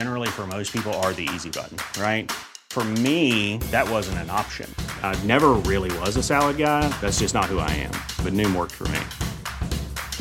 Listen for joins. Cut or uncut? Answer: uncut